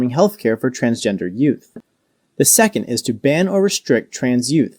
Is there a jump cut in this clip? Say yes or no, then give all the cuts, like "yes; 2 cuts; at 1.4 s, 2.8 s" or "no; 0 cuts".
yes; 1 cut; at 1.7 s